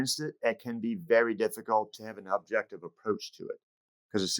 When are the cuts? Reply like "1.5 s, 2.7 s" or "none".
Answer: 2.0 s